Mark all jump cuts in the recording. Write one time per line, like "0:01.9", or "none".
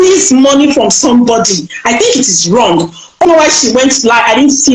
0:03.2